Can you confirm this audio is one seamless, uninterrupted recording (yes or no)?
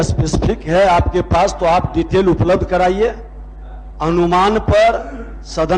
yes